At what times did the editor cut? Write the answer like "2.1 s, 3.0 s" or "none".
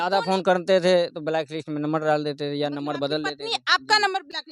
none